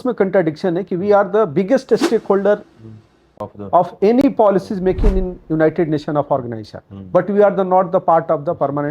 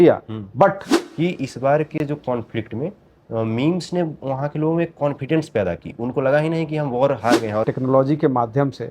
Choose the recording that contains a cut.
second; 2 cuts; at 0.9 s, 7.7 s

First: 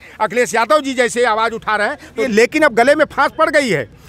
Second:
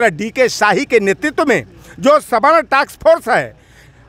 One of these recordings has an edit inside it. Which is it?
first; 1 cut; at 2.2 s

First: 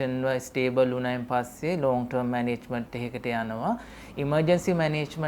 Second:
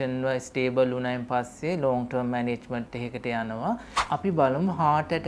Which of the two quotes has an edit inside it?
second; 1 cut; at 4.0 s

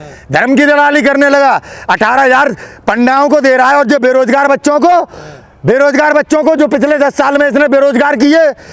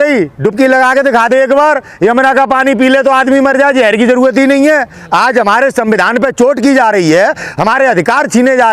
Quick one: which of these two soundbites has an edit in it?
second; 1 cut; at 5.0 s

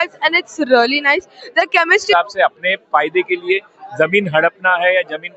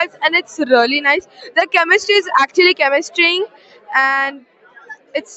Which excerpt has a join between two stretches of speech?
first; 1 cut; at 2.1 s

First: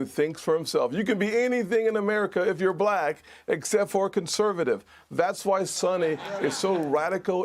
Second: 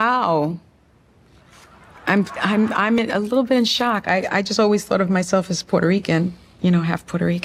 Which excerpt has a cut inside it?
first; 1 cut; at 4.9 s

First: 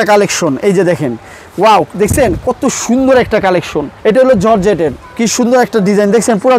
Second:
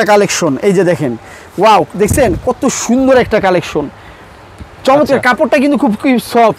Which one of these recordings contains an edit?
first; 1 cut; at 3.9 s

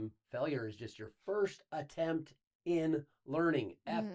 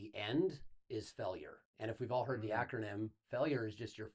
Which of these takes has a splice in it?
second; 1 cut; at 1.6 s

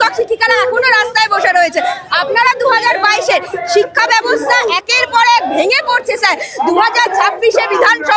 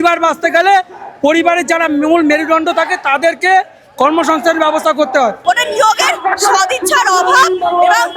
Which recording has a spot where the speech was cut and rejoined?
second; 1 cut; at 5.4 s

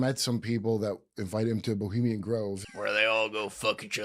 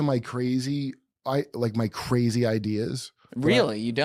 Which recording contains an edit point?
first; 1 cut; at 2.6 s

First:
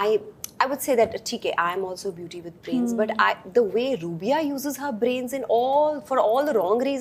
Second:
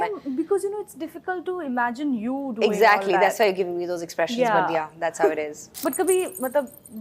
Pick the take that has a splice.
second; 1 cut; at 5.6 s

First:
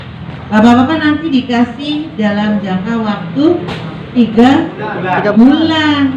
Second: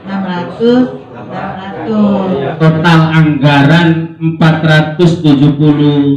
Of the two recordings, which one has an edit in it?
second; 1 cut; at 2.5 s

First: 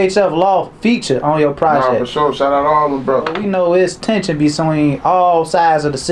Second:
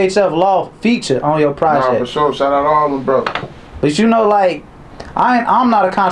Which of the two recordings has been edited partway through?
first; 1 cut; at 3.4 s

